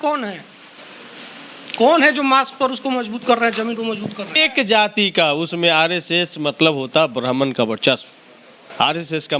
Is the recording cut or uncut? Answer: cut